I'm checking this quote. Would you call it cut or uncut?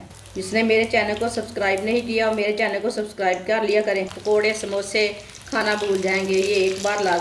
cut